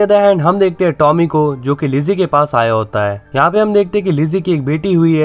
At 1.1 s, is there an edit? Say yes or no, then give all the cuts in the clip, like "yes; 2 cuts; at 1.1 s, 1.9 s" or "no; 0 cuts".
no; 1 cut; at 3.2 s